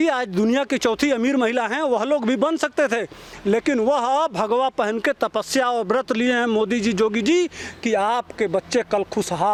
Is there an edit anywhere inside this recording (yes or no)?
no